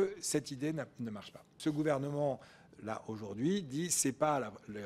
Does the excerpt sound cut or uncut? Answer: cut